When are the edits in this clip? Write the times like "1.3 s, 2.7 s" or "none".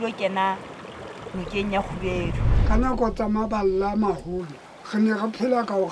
2.5 s